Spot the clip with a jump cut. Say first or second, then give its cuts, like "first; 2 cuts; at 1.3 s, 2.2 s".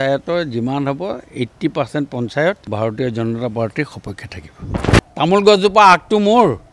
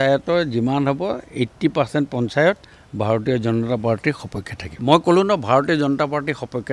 first; 2 cuts; at 2.6 s, 4.8 s